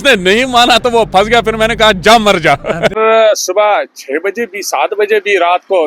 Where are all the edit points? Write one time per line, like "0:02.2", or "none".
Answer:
0:03.0